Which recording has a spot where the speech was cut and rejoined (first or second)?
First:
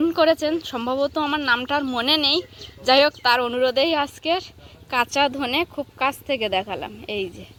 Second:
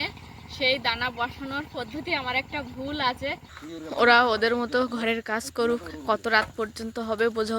second